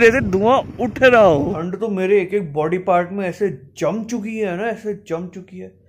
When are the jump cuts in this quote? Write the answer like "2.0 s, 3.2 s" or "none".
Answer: 1.6 s